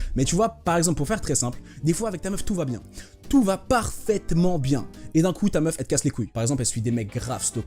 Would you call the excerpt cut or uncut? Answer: cut